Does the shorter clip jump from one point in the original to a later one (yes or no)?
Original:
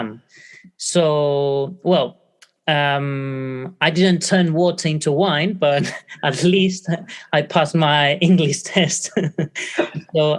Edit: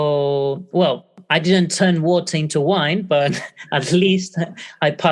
yes